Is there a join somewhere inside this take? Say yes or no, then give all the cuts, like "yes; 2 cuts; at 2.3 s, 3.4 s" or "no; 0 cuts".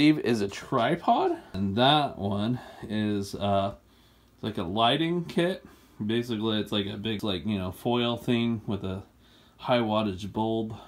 yes; 2 cuts; at 1.5 s, 7.2 s